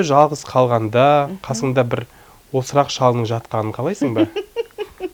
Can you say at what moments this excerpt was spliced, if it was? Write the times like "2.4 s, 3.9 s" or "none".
none